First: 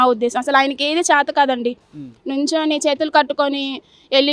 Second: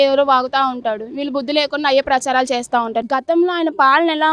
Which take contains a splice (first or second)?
second